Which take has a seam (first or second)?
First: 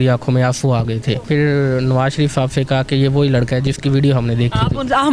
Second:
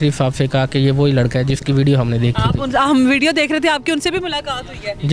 first